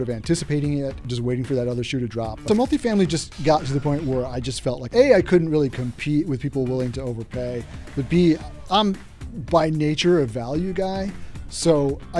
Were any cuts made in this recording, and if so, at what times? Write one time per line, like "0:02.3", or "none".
0:01.1
0:02.5
0:04.8